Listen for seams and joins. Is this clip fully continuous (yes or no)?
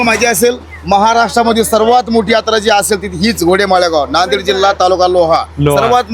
yes